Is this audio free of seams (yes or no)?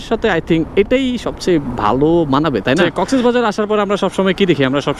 no